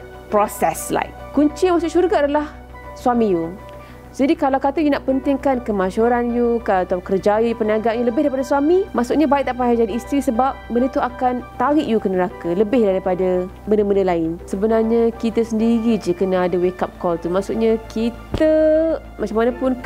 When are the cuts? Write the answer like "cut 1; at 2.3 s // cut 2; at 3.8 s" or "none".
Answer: cut 1; at 1.2 s // cut 2; at 8.9 s // cut 3; at 11.5 s // cut 4; at 13.5 s // cut 5; at 14.4 s